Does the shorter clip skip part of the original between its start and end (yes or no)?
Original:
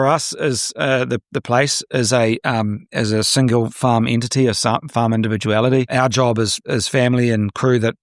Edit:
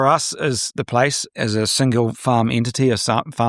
yes